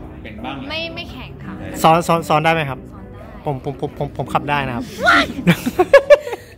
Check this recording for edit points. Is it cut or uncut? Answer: uncut